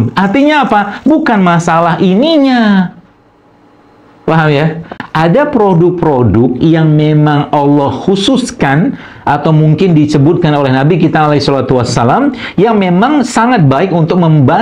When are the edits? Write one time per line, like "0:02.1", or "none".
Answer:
0:05.0